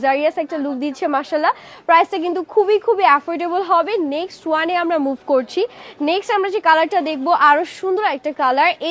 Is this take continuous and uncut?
yes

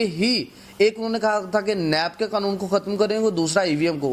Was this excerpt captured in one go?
yes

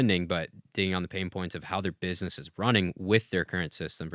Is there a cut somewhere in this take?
no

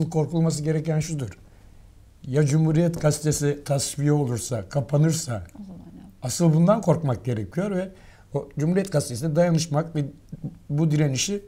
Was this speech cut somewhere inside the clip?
yes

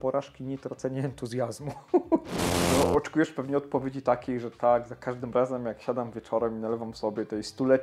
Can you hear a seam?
yes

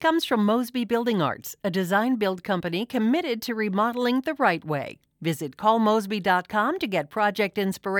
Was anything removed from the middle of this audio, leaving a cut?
no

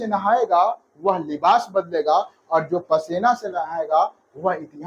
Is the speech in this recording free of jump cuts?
yes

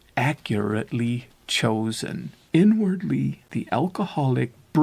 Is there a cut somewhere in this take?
yes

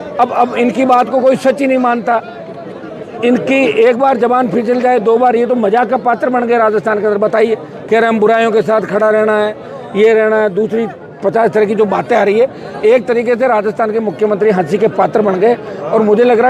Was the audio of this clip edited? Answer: no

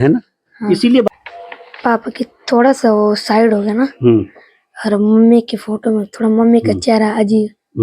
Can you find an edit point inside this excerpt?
yes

